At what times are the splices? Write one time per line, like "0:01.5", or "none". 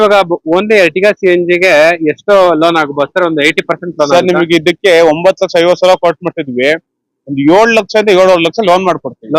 none

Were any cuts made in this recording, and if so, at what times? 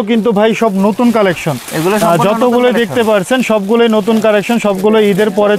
none

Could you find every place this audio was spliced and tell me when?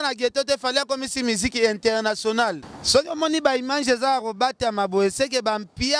0:02.7

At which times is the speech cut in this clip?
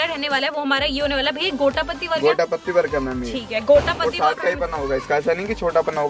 none

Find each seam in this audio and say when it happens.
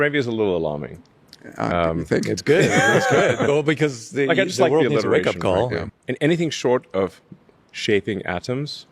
0:05.9

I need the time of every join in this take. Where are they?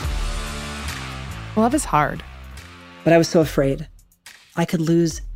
0:01.5

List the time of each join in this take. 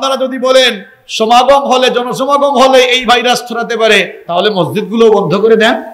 none

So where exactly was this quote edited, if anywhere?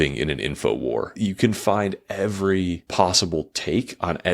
0:01.1
0:02.8

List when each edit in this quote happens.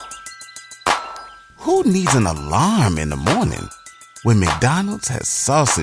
none

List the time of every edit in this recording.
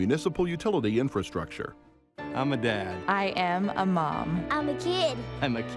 none

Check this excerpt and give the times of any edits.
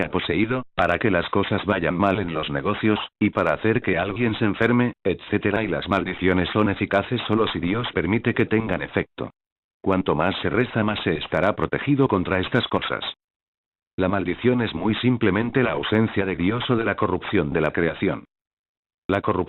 none

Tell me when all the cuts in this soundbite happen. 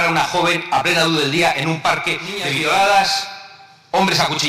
0:02.5

